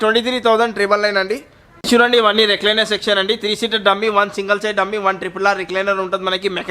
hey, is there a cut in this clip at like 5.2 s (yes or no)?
no